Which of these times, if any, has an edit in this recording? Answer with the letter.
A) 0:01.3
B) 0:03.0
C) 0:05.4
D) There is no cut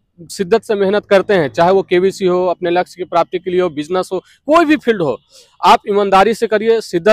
D